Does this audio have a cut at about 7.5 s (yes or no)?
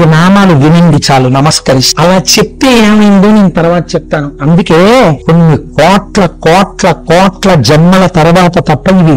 no